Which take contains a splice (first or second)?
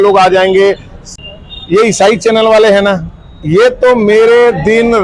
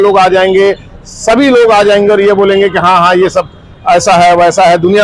first